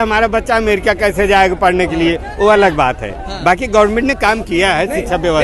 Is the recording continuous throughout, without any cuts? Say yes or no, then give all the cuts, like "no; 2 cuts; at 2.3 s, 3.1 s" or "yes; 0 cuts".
yes; 0 cuts